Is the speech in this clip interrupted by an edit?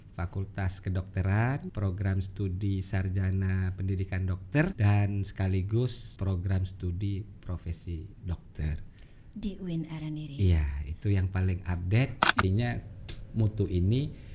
yes; 4 cuts; at 1.7 s, 4.8 s, 6.1 s, 12.4 s

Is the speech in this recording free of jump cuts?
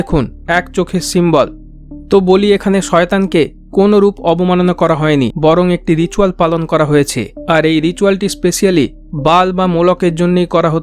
no; 1 cut; at 1.8 s

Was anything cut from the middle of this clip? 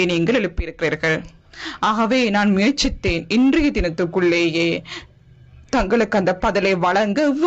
no; 0 cuts

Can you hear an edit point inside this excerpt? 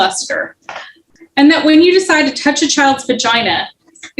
yes; 1 cut; at 1.0 s

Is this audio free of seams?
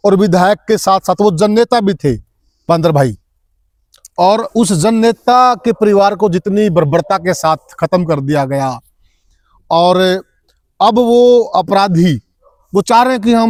yes; 0 cuts

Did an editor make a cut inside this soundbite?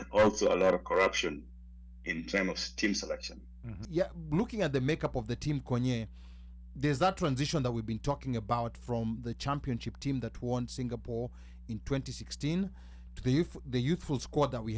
yes; 1 cut; at 3.8 s

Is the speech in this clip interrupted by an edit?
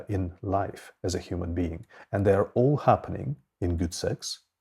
no; 0 cuts

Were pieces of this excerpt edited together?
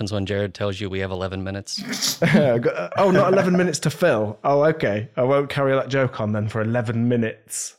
no; 0 cuts

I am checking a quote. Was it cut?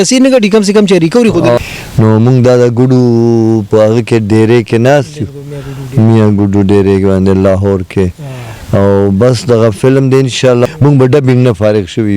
yes; 2 cuts; at 1.6 s, 10.7 s

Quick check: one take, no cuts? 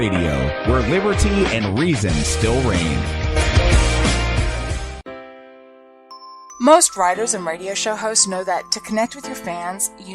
no; 1 cut; at 5.0 s

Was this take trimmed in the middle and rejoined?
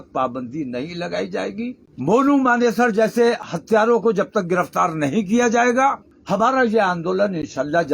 yes; 2 cuts; at 1.8 s, 6.1 s

